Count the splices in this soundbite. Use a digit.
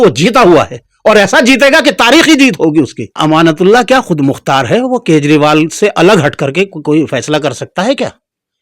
1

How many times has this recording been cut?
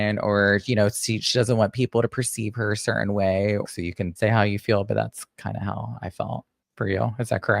2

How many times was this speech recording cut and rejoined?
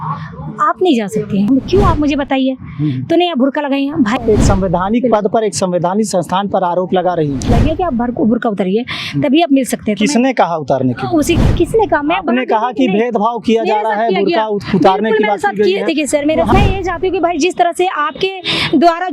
5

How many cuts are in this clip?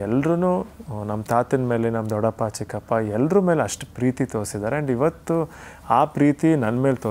0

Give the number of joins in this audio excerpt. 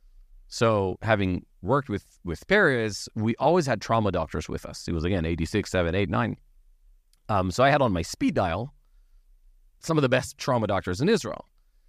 0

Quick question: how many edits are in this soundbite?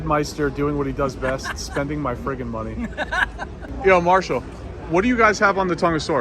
1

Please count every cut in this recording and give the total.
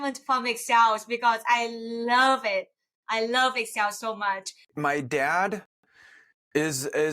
1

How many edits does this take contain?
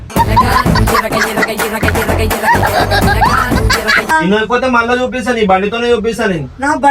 1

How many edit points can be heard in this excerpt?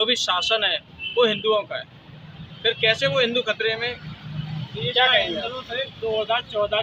0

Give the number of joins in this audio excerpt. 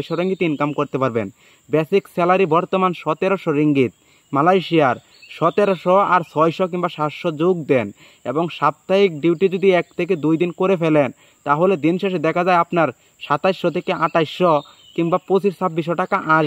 0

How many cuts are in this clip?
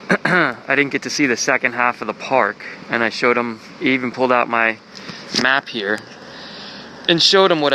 1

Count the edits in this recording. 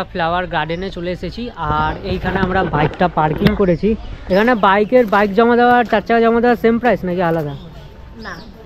1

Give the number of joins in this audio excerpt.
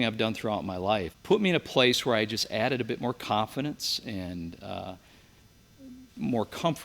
1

